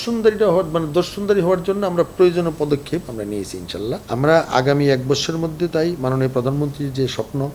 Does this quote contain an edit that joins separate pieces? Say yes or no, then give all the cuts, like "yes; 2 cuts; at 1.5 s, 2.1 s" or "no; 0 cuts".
yes; 1 cut; at 4.0 s